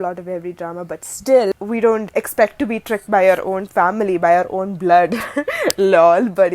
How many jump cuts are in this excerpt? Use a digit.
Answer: 1